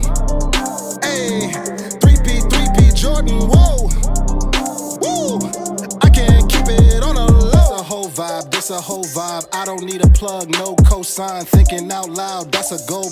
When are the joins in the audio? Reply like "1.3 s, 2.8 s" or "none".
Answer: none

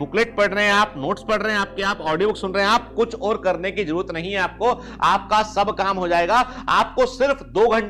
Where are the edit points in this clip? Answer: none

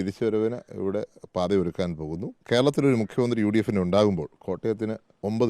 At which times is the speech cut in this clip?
2.3 s

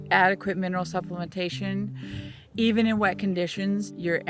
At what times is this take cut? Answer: none

